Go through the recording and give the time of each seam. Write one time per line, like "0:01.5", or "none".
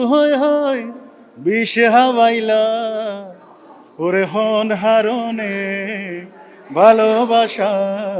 none